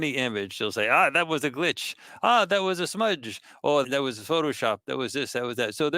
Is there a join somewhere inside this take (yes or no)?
yes